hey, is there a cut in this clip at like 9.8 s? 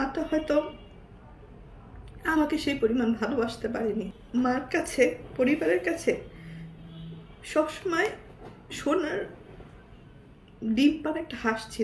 no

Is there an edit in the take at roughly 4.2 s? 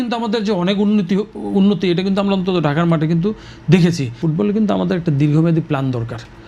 yes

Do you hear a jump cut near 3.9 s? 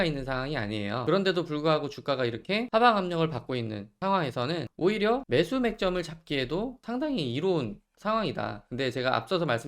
yes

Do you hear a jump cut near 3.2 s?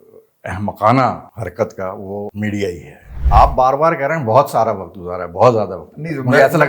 yes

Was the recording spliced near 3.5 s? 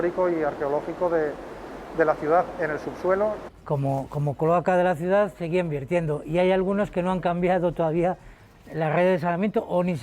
yes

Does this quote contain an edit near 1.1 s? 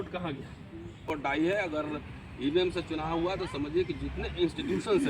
yes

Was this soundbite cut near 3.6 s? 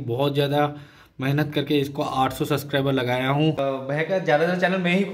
yes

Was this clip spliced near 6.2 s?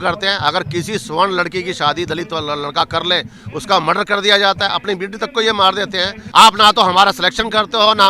yes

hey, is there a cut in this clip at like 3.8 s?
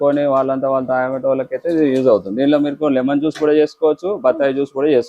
no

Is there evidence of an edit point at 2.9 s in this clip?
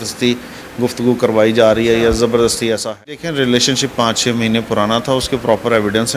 yes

